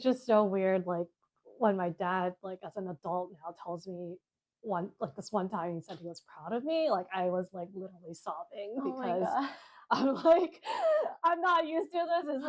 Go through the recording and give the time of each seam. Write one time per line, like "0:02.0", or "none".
none